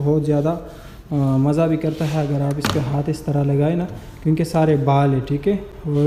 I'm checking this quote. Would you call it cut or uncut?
uncut